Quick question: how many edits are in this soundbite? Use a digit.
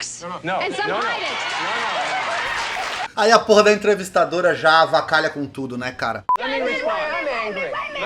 1